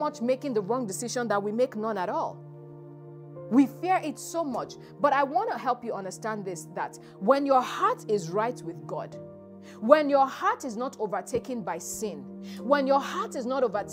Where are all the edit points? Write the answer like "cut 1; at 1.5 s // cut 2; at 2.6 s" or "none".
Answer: none